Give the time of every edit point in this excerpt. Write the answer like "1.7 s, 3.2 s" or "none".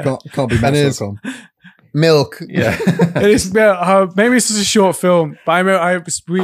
none